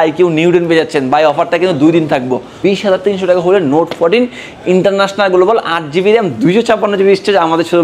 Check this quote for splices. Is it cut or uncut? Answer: cut